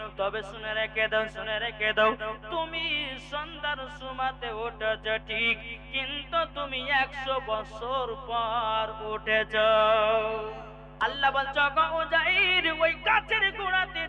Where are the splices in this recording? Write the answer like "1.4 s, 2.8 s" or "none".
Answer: 11.0 s